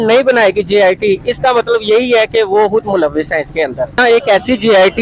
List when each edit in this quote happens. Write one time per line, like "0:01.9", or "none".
0:04.0